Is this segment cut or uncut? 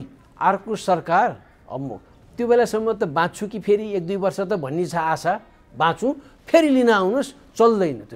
uncut